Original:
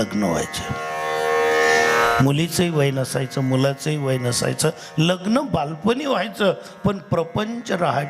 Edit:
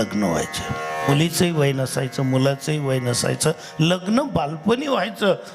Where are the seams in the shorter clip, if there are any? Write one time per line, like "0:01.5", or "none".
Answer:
0:01.1